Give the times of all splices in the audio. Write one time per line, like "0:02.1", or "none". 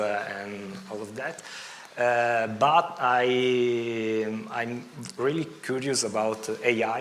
none